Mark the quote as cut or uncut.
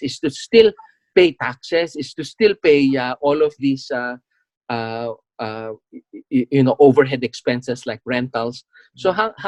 uncut